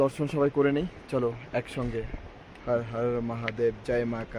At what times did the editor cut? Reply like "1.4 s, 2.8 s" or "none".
none

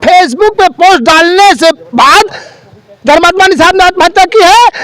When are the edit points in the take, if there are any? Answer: none

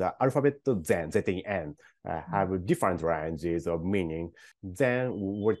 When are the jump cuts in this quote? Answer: none

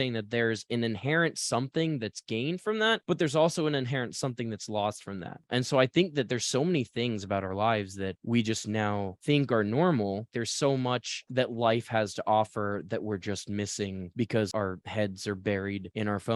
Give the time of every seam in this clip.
5.4 s, 10.3 s

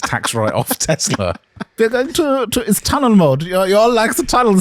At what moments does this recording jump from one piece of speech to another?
1.7 s

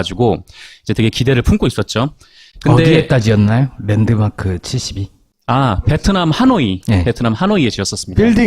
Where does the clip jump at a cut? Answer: 6.2 s

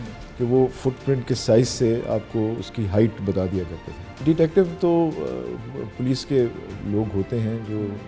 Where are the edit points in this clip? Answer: 4.2 s

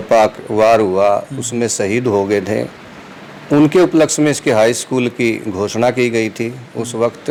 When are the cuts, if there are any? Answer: none

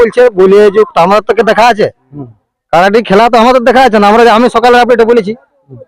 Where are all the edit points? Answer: none

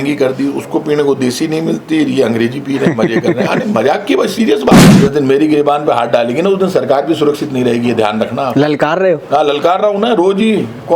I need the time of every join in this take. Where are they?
4.9 s

